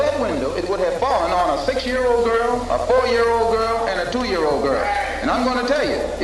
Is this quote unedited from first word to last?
yes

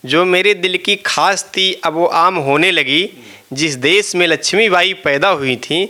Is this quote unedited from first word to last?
yes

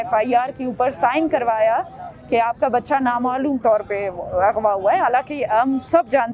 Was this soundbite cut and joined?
no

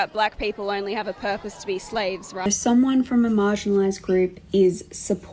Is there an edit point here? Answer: yes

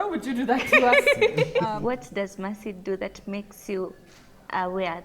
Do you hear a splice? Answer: yes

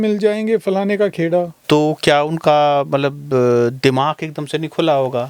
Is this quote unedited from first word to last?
no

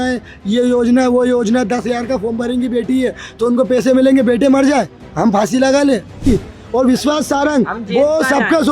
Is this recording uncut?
no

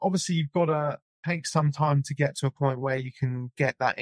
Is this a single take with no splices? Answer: no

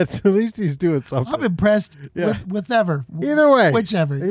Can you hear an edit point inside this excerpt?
no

